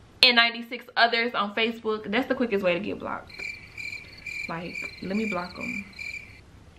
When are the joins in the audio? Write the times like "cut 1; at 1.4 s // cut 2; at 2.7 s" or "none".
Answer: none